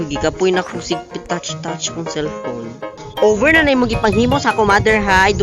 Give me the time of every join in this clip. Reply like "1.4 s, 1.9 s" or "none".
3.2 s